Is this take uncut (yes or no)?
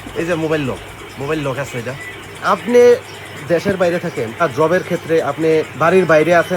no